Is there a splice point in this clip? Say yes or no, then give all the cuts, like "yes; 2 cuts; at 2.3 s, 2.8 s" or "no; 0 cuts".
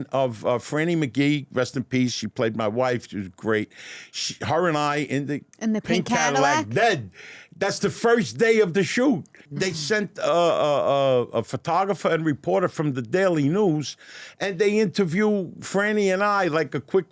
yes; 1 cut; at 9.3 s